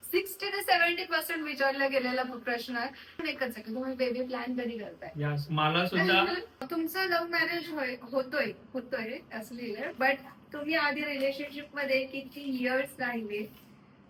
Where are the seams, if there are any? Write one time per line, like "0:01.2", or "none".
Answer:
0:03.1
0:06.6